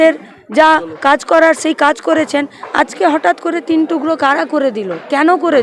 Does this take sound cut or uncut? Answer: uncut